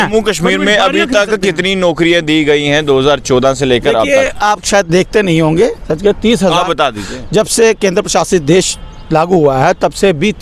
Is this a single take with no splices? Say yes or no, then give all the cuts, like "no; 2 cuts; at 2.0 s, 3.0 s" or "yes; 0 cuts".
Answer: yes; 0 cuts